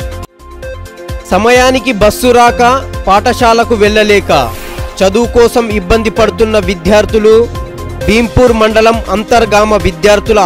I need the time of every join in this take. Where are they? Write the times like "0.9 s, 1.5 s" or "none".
1.2 s